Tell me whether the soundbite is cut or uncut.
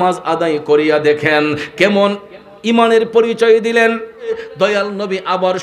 cut